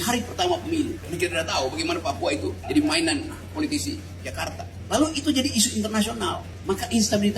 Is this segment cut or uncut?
cut